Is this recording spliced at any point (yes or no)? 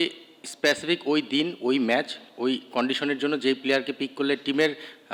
no